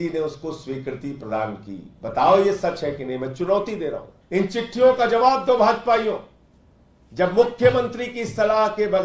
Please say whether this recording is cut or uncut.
cut